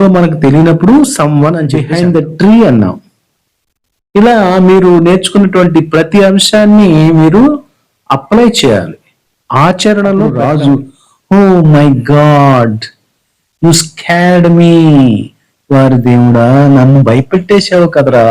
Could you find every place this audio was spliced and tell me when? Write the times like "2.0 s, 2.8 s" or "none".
1.8 s, 10.4 s